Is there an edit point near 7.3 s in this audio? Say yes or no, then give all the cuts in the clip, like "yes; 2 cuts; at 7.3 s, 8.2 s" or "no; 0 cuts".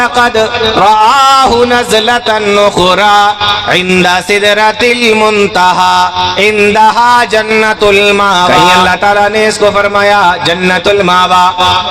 no; 1 cut; at 8.9 s